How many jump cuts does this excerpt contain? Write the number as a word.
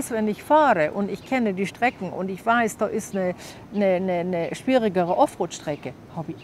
zero